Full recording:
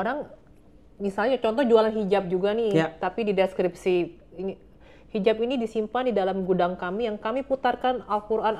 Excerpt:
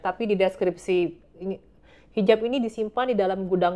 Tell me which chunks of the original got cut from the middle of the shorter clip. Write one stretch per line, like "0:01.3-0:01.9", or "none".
none

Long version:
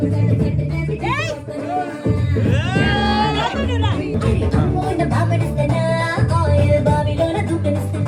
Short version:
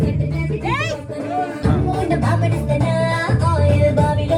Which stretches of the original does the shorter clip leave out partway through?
0:02.0-0:04.5

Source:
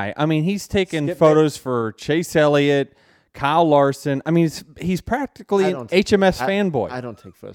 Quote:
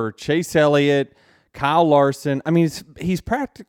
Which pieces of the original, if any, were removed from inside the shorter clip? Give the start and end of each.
none

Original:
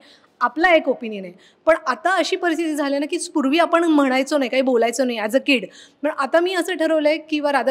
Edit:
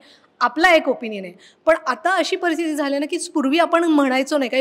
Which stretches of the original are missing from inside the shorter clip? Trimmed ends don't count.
none

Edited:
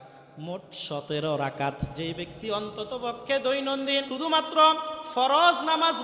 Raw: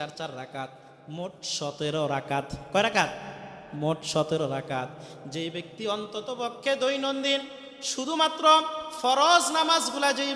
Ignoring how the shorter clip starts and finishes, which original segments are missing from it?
0:02.6-0:05.2
0:07.4-0:07.9

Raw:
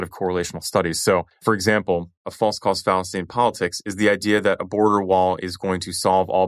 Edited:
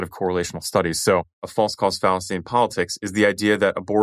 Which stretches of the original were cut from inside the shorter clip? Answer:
0:01.3-0:02.2

